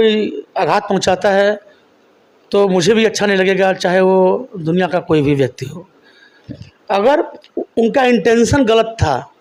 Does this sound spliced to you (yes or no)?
no